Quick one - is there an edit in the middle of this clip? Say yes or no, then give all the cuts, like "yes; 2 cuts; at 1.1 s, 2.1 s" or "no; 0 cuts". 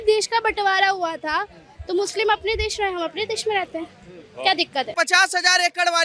yes; 1 cut; at 4.9 s